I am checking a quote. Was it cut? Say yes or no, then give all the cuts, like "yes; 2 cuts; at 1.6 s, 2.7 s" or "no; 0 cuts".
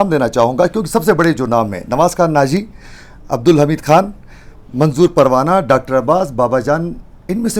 no; 0 cuts